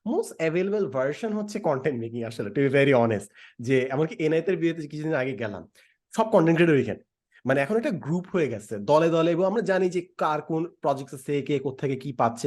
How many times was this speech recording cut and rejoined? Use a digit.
0